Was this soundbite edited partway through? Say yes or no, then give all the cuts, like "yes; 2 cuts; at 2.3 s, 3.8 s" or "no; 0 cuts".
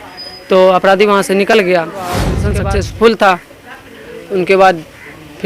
yes; 1 cut; at 2.4 s